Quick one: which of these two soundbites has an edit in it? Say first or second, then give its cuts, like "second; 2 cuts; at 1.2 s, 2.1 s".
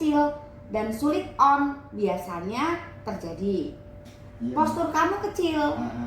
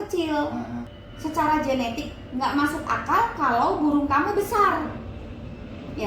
first; 1 cut; at 4.3 s